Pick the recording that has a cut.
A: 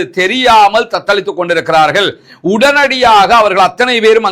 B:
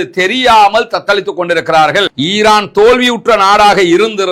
B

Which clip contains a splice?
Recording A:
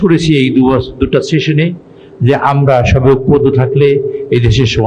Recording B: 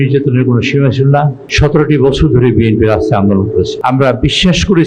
B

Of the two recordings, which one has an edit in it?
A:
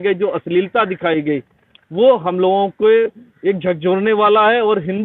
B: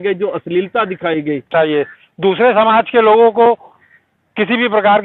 B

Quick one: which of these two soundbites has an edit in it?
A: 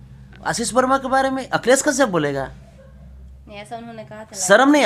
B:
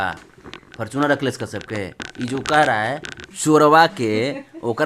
B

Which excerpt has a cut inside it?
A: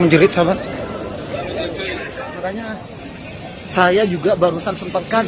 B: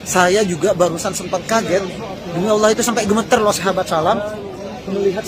A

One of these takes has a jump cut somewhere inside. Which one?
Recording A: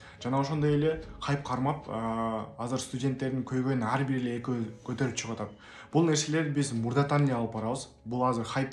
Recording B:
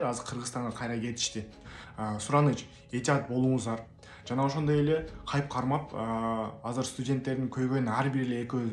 B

